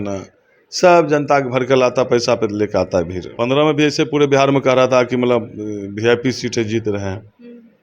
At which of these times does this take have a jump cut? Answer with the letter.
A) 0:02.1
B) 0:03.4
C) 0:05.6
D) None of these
B